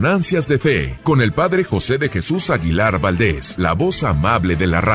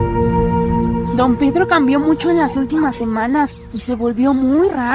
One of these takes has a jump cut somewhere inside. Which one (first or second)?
first